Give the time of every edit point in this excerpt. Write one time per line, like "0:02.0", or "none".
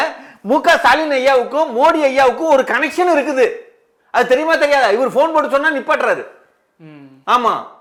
none